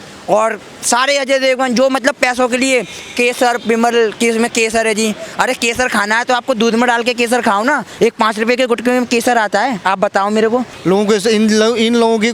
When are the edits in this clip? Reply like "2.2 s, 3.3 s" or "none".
10.7 s